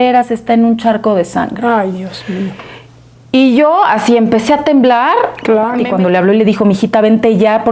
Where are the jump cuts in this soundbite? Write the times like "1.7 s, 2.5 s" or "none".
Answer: 5.8 s